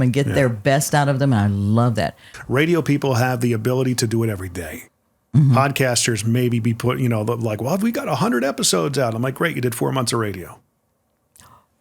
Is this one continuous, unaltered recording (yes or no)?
no